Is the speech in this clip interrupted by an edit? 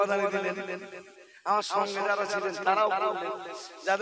no; 0 cuts

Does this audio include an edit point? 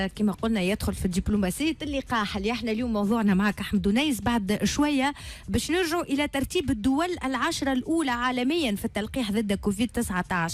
no; 0 cuts

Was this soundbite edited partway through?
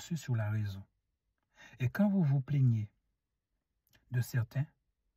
no; 0 cuts

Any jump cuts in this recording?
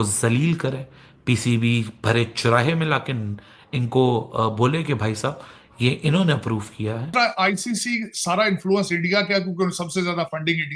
yes; 1 cut; at 7.1 s

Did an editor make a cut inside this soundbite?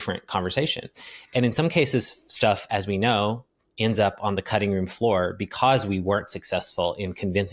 no; 0 cuts

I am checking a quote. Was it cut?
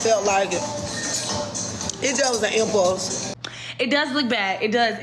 yes; 1 cut; at 3.2 s

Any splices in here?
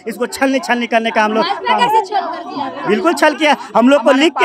no; 0 cuts

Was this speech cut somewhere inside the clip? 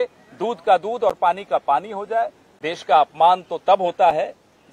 yes; 1 cut; at 2.5 s

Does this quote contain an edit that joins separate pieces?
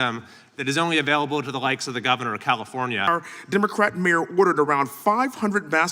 yes; 1 cut; at 3.1 s

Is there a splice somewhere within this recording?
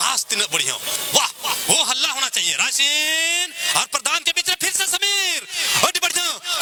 no; 0 cuts

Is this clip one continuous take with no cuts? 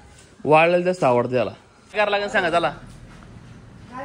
no; 1 cut; at 1.9 s

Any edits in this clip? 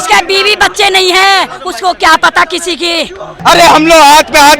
yes; 1 cut; at 3.3 s

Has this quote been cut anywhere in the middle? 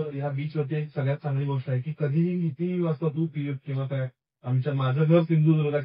no; 0 cuts

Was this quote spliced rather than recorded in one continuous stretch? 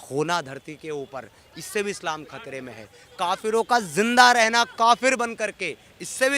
no; 0 cuts

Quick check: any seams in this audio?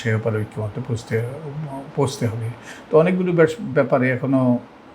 no; 0 cuts

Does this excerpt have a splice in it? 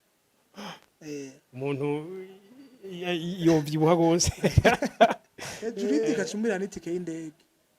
yes; 1 cut; at 5.8 s

